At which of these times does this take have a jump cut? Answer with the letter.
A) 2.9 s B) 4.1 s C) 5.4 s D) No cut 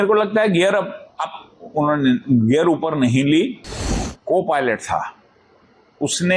B